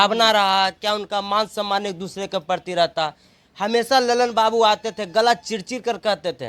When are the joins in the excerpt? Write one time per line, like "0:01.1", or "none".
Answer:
none